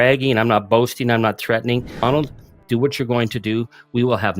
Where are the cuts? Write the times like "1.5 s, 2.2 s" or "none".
1.9 s